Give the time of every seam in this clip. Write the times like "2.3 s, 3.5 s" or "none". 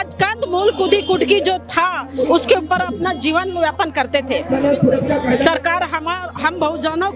none